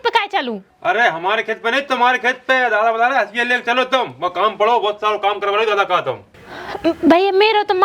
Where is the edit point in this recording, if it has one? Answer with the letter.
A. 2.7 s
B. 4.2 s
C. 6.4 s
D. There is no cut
D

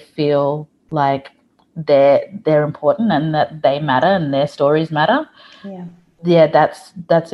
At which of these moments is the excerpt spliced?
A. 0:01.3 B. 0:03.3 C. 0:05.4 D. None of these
D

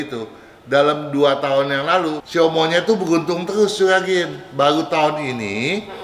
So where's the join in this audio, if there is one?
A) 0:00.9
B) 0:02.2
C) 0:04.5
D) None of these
B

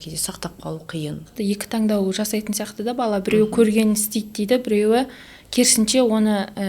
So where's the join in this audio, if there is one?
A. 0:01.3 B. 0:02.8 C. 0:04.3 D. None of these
A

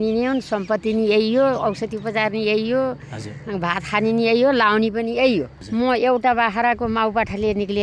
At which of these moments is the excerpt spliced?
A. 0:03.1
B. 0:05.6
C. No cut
B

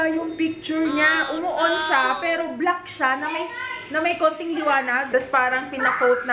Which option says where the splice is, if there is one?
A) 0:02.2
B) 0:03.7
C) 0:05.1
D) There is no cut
C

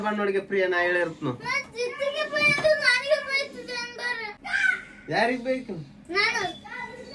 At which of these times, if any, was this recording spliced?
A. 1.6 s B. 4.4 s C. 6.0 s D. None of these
B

